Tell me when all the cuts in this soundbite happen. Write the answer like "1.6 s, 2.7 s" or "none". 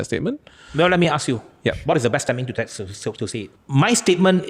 3.6 s